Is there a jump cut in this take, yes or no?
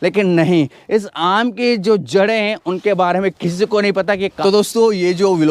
yes